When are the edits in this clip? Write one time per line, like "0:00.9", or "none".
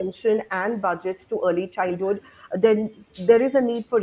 none